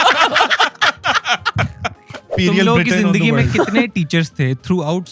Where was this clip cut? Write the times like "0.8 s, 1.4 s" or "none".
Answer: 2.3 s